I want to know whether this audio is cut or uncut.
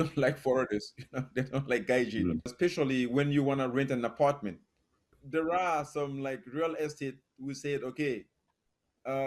cut